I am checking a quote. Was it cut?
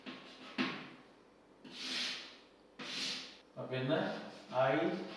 yes; 1 cut; at 3.4 s

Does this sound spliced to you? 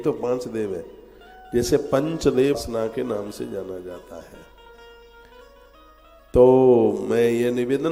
yes; 1 cut; at 2.6 s

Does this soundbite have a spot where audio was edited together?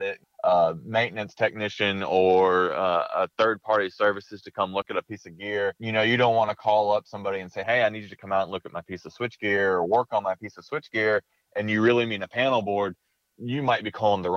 no; 0 cuts

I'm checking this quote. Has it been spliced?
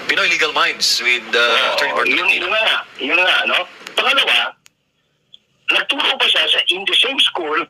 no; 0 cuts

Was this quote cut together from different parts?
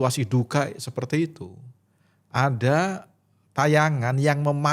no; 0 cuts

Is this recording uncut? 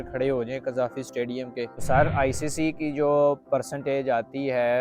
no; 1 cut; at 1.8 s

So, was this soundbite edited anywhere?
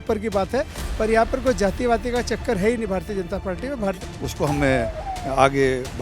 yes; 1 cut; at 4.1 s

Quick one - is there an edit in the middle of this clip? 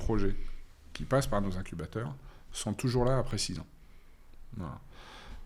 no; 0 cuts

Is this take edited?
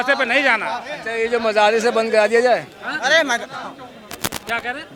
no; 0 cuts

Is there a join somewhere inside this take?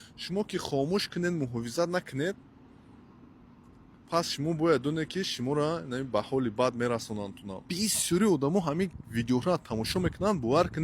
yes; 1 cut; at 7.7 s

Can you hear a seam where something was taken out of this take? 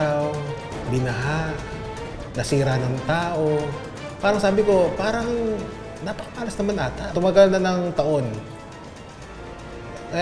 yes; 1 cut; at 7.1 s

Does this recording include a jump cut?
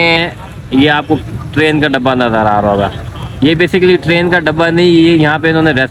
no; 0 cuts

